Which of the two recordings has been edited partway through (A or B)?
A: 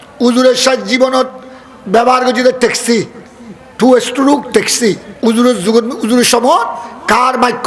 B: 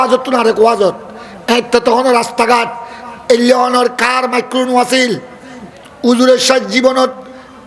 A